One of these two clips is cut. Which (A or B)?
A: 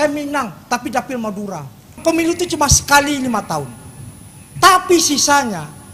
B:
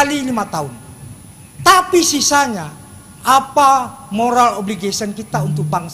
A